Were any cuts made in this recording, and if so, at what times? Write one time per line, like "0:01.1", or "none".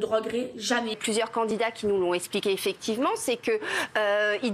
0:01.0